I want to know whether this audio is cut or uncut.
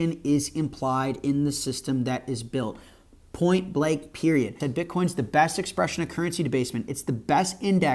cut